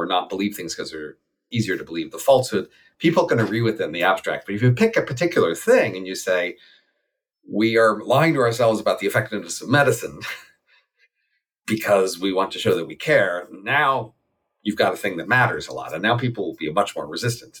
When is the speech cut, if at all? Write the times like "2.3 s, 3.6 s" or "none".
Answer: 1.4 s